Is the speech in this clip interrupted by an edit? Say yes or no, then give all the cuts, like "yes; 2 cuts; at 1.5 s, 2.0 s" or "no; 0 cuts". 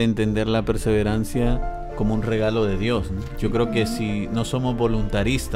no; 0 cuts